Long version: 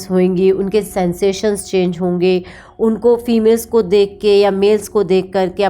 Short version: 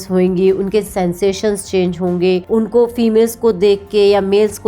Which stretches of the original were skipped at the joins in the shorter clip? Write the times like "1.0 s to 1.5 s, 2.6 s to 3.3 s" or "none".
2.4 s to 2.7 s